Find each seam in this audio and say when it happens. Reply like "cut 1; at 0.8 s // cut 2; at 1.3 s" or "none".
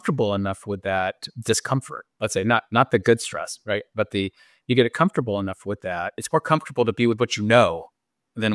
cut 1; at 6.2 s